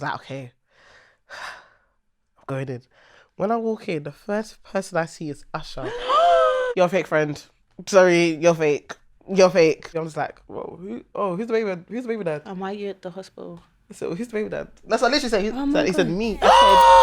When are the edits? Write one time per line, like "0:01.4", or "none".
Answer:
0:06.7
0:09.9

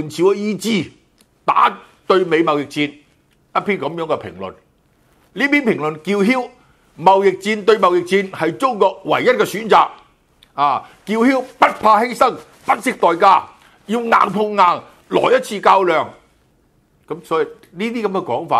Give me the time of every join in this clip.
none

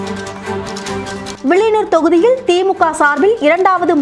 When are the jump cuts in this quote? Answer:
0:01.2

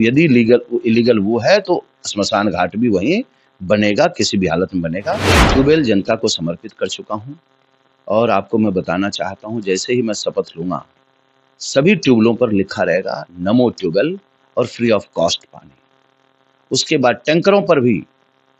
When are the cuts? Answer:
0:05.3

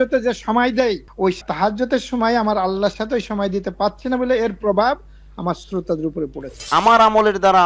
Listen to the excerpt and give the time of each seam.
0:01.5
0:06.7

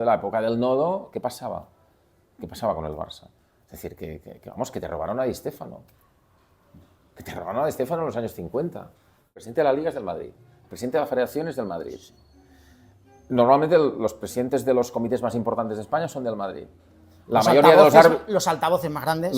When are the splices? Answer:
0:09.4

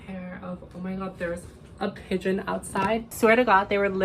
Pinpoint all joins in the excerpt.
0:03.1

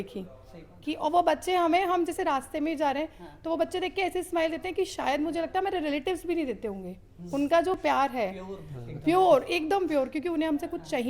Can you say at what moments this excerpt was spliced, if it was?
none

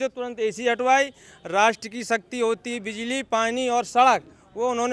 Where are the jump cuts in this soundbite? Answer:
none

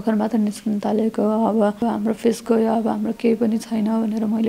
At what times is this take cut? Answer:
0:01.8

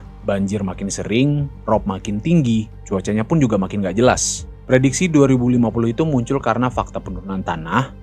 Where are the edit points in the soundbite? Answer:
0:04.5

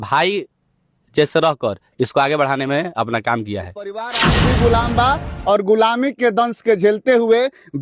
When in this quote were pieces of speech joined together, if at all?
0:04.3

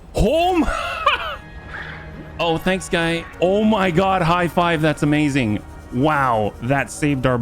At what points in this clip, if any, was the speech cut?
0:03.3

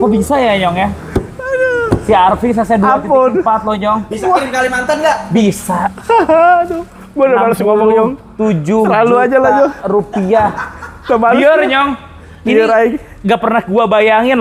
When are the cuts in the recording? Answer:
none

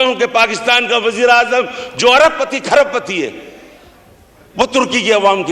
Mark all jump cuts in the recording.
none

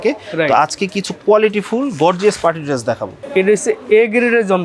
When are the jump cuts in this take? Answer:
0:03.1

